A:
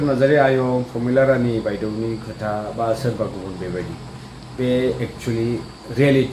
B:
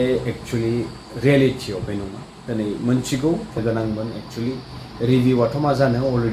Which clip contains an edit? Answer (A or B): B